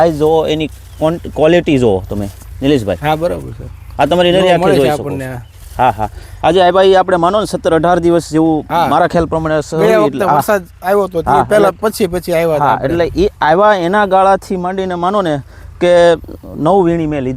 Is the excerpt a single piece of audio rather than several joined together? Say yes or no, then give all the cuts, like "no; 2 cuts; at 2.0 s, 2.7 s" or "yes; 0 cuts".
yes; 0 cuts